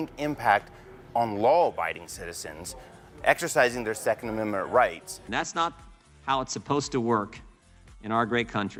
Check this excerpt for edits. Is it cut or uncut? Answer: uncut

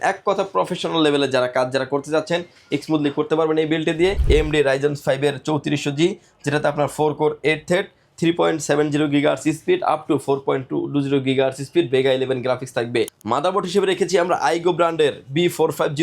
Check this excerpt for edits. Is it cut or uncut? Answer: cut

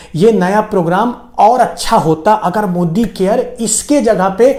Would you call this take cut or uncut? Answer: uncut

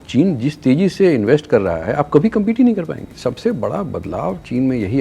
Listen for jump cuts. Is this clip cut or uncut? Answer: cut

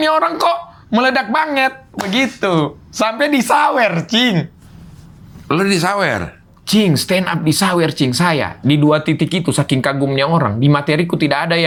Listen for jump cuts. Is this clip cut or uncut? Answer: uncut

